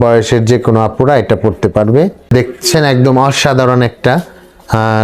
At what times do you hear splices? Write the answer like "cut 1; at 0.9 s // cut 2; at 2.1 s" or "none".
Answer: cut 1; at 2.3 s